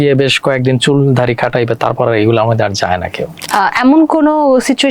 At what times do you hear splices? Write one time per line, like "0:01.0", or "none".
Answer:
0:03.4

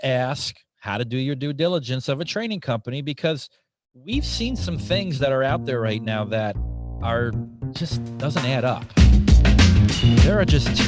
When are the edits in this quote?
0:08.9

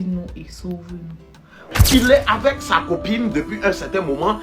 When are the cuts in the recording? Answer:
0:01.7

